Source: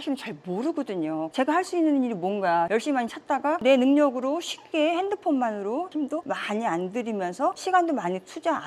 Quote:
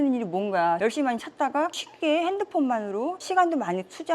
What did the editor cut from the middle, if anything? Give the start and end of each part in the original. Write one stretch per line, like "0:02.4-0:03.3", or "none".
0:03.6-0:04.4
0:05.9-0:07.6